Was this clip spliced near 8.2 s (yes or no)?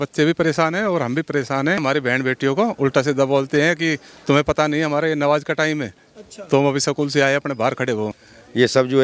yes